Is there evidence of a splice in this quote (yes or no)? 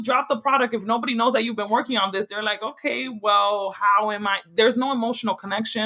no